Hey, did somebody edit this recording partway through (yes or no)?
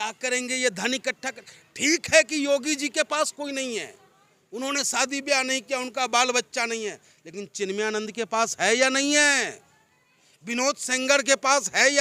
no